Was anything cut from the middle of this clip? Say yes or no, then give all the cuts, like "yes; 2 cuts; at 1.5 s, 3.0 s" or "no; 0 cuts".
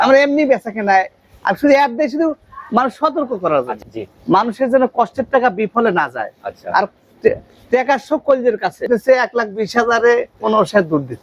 yes; 2 cuts; at 3.8 s, 8.9 s